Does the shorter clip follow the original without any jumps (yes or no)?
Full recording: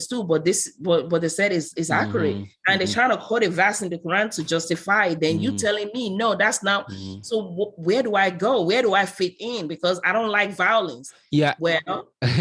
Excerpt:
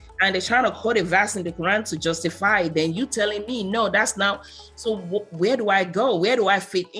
yes